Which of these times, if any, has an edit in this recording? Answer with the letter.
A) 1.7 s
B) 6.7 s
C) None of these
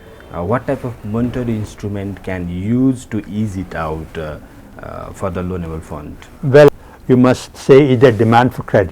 B